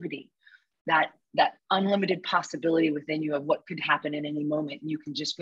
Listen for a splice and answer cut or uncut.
uncut